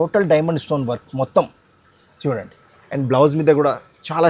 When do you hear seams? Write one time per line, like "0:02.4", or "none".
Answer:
none